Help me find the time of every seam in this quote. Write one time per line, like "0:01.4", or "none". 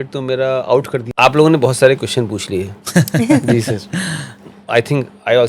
0:01.1